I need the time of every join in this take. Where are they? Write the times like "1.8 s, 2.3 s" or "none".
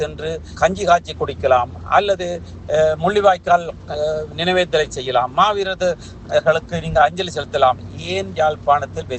none